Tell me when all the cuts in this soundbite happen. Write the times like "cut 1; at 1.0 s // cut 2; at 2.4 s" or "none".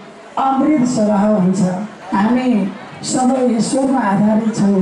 cut 1; at 1.9 s